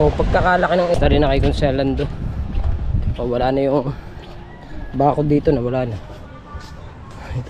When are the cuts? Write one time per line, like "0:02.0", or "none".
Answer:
0:00.9